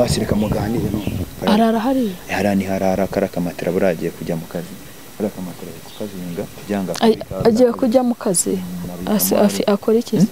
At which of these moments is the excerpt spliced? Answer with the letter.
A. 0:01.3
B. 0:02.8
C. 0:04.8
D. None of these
A